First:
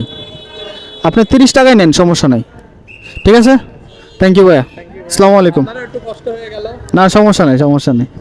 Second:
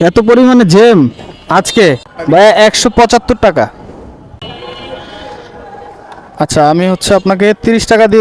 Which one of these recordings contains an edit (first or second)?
second